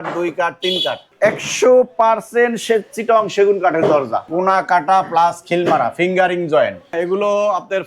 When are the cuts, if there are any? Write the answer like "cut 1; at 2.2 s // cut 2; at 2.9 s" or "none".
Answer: cut 1; at 1.1 s // cut 2; at 4.2 s // cut 3; at 6.9 s